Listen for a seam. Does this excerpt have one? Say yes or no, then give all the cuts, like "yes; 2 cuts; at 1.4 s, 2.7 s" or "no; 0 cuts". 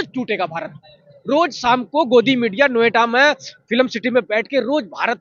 no; 0 cuts